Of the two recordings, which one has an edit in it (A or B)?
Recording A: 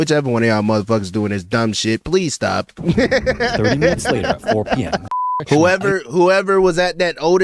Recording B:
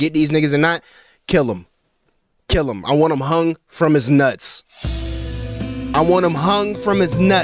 A